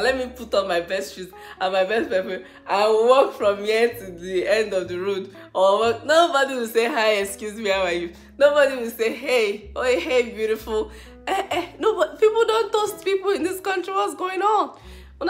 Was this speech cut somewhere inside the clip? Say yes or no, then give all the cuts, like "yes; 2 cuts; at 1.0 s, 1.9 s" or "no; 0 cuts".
no; 0 cuts